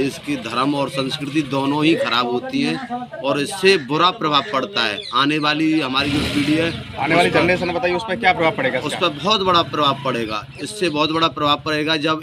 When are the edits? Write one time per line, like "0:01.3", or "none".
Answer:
none